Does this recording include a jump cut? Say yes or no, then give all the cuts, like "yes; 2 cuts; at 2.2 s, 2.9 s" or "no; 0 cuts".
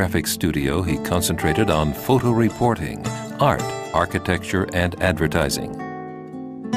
yes; 1 cut; at 1.2 s